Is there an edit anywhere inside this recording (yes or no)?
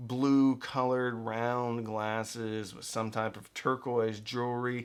no